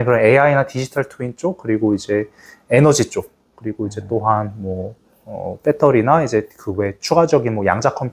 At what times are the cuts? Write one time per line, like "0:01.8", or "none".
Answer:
none